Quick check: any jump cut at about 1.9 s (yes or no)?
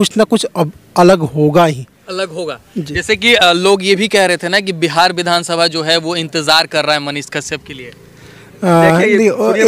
no